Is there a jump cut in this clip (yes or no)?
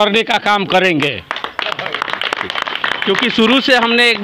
no